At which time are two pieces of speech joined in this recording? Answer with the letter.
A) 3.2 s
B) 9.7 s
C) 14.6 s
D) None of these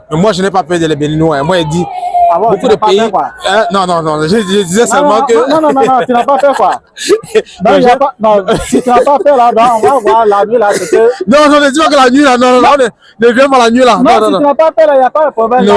D